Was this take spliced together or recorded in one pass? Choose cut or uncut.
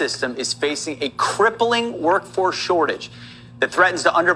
cut